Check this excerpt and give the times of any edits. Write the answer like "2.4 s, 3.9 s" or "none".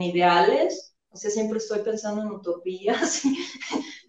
none